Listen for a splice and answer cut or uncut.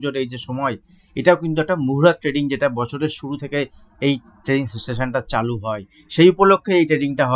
uncut